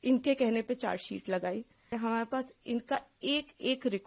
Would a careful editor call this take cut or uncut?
cut